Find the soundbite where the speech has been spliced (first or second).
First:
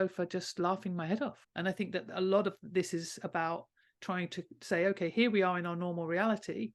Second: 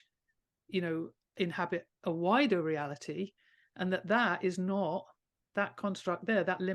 first